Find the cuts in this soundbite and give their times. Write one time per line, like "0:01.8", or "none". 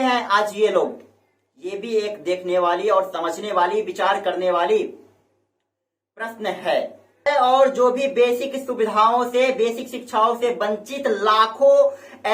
0:07.4

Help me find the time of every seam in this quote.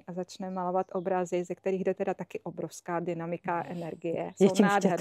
none

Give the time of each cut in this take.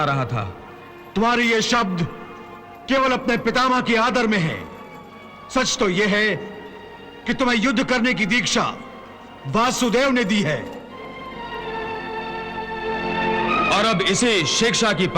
none

